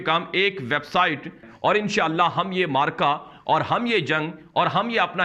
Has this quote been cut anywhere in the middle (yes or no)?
yes